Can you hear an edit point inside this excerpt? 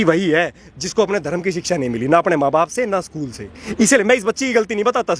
no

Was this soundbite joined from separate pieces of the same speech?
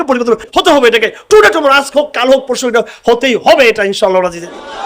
no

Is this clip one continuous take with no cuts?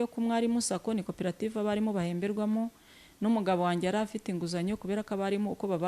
yes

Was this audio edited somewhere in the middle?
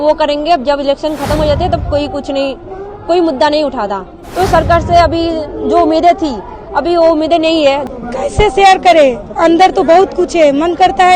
yes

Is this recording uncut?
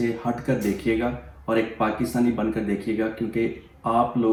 yes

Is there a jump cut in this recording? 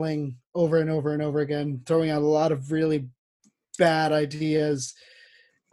no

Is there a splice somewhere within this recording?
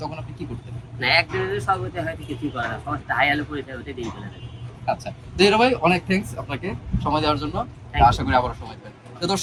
no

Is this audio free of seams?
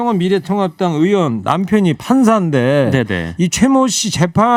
yes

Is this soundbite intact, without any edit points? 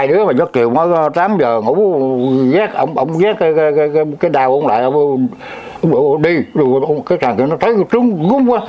yes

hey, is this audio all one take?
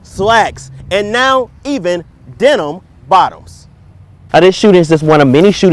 no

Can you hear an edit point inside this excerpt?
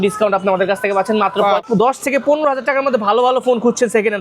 yes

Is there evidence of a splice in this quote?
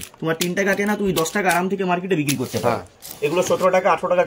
yes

